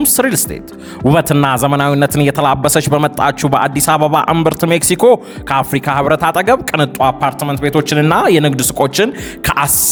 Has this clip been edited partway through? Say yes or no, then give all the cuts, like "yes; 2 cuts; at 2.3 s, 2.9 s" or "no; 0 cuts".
no; 0 cuts